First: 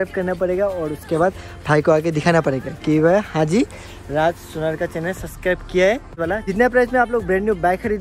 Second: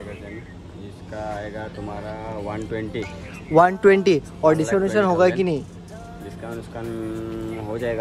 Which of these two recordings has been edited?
first; 1 cut; at 6.2 s

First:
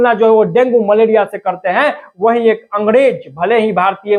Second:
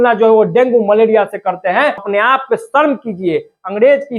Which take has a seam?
second; 1 cut; at 2.1 s

